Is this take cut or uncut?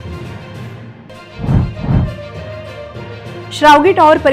cut